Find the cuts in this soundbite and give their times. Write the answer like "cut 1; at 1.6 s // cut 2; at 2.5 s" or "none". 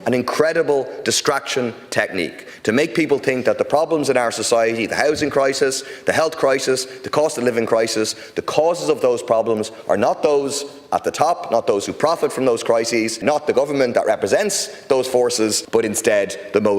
cut 1; at 13.2 s // cut 2; at 15.6 s